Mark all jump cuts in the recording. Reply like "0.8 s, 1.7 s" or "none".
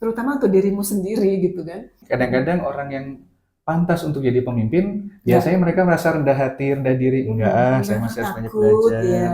2.0 s